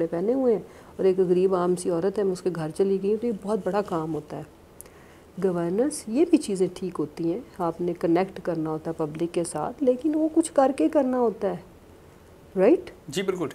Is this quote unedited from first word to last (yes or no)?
yes